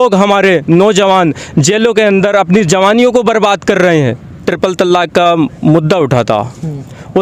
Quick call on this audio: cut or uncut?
cut